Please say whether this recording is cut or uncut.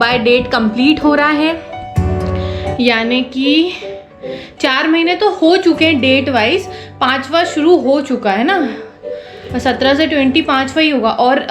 uncut